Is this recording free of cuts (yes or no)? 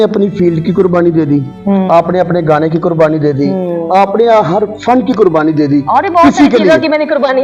yes